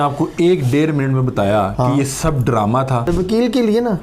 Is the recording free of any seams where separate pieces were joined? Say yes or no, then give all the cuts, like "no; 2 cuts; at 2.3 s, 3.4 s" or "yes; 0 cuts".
no; 1 cut; at 3.1 s